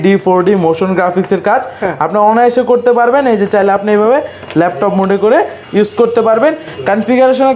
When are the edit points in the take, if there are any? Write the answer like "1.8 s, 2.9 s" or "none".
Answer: none